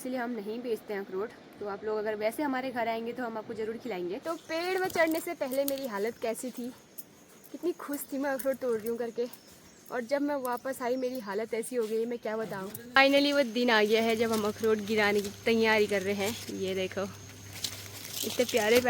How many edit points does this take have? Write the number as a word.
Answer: two